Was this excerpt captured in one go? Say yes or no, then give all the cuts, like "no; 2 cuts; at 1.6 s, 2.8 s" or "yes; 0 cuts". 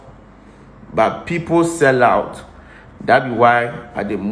yes; 0 cuts